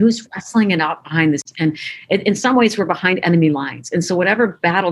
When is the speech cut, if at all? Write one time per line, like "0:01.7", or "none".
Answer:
0:01.5